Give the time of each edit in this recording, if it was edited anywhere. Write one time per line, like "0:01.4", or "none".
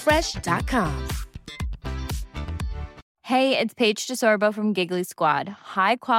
0:03.1